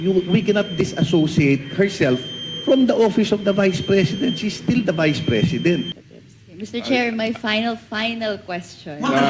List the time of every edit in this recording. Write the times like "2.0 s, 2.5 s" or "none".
6.0 s